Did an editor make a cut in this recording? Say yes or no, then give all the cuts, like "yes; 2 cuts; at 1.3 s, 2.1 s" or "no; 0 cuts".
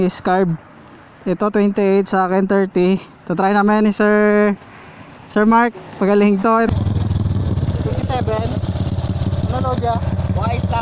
yes; 1 cut; at 6.7 s